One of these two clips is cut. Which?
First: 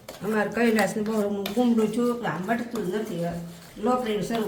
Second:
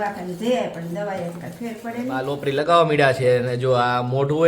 second; 1 cut; at 2.2 s

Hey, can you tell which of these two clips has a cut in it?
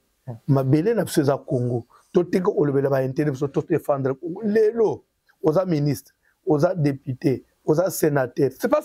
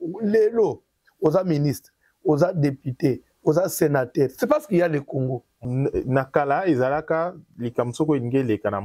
second; 1 cut; at 5.6 s

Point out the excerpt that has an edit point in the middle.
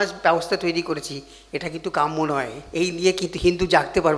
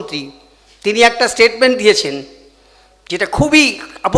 first; 1 cut; at 2.6 s

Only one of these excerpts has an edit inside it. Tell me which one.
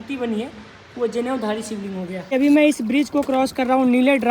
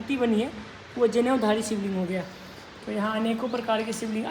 first; 1 cut; at 2.2 s

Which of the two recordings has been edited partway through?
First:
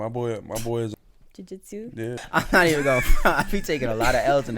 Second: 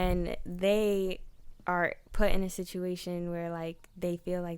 first; 2 cuts; at 0.9 s, 2.2 s

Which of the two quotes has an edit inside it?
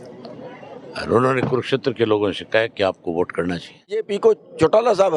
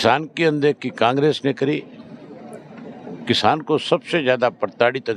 first; 1 cut; at 4.1 s

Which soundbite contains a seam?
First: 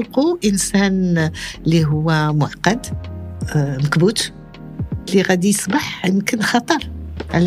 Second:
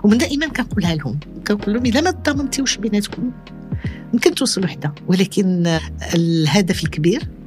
second; 3 cuts; at 1.4 s, 5.0 s, 5.9 s

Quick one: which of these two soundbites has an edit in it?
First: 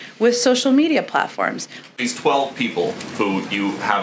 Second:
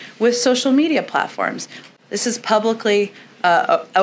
first; 1 cut; at 2.0 s

